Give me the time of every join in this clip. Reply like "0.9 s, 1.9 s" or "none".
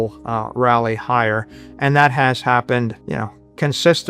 3.0 s